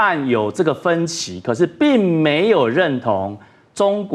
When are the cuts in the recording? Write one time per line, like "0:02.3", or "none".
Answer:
none

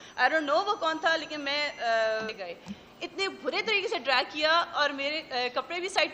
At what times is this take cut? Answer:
0:02.4

